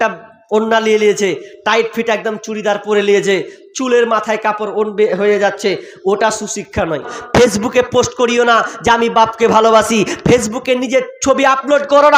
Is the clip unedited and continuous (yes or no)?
no